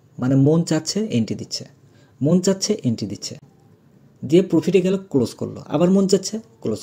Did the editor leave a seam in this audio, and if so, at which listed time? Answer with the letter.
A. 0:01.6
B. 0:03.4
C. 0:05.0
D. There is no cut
D